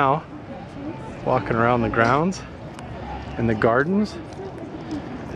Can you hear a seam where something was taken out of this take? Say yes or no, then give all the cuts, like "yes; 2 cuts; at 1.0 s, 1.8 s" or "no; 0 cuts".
no; 0 cuts